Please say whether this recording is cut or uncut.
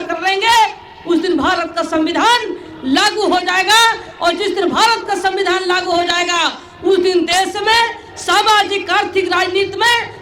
uncut